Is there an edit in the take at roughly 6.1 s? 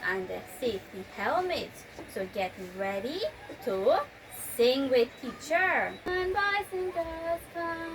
yes; 1 cut; at 6.1 s

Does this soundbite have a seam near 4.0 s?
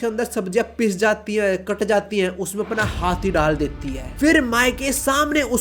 yes; 1 cut; at 4.0 s

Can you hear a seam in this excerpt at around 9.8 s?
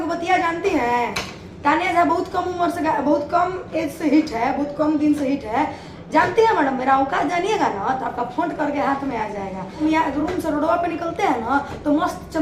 yes; 1 cut; at 9.8 s

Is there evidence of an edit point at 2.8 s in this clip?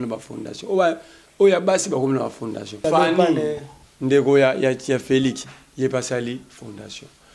yes; 1 cut; at 2.8 s

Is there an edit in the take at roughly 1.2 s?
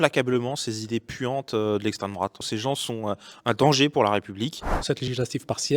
no; 2 cuts; at 2.5 s, 4.8 s

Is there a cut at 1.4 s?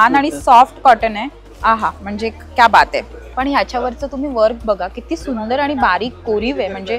yes; 2 cuts; at 1.4 s, 3.2 s

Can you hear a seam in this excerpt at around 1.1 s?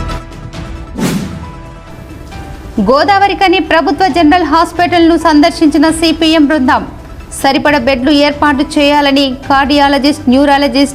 yes; 1 cut; at 1.1 s

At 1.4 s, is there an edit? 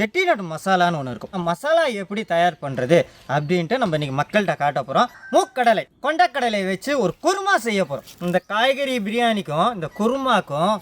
yes; 2 cuts; at 1.4 s, 5.2 s

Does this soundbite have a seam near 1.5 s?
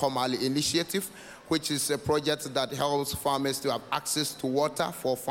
no; 0 cuts

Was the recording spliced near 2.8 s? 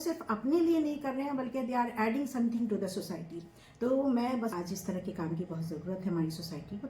no; 1 cut; at 4.5 s

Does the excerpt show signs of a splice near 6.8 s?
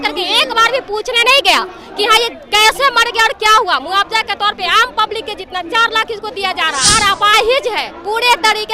yes; 1 cut; at 6.8 s

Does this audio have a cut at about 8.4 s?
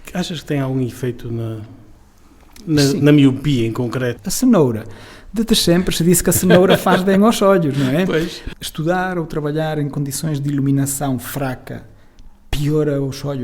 yes; 2 cuts; at 4.2 s, 8.4 s

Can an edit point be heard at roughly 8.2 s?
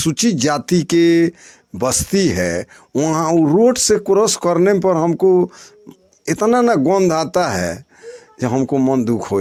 no; 0 cuts

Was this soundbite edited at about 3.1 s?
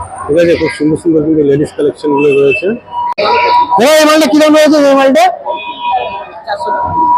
yes; 1 cut; at 3.1 s

